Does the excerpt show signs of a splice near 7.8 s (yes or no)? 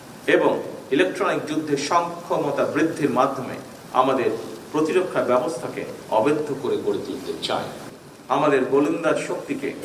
yes